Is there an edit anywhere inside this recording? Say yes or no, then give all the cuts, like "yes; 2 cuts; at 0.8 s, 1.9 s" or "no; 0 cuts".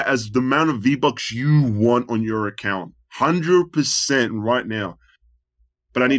no; 0 cuts